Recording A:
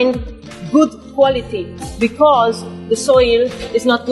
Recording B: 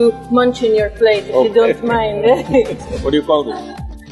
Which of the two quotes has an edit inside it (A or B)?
B